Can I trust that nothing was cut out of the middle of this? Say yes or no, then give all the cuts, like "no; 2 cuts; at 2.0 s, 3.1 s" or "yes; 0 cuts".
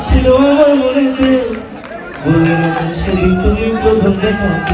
yes; 0 cuts